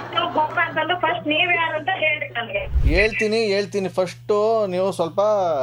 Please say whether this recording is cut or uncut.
uncut